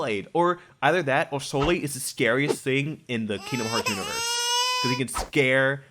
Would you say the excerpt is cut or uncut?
uncut